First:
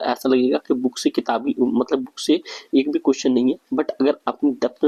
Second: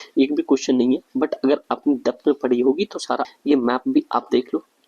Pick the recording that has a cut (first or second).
second